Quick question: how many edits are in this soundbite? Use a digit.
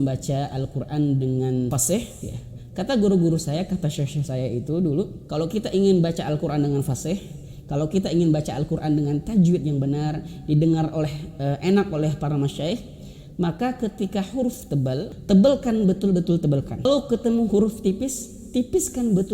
4